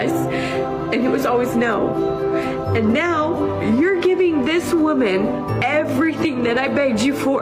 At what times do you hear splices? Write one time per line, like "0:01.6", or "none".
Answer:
none